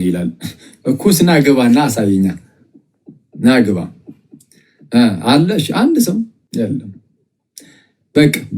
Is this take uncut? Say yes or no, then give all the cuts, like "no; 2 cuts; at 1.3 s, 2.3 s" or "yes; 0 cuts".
no; 1 cut; at 6.4 s